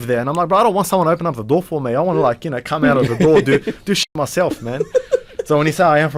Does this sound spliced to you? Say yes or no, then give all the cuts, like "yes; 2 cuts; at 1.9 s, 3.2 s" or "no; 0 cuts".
no; 0 cuts